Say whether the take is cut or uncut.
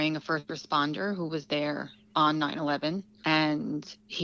cut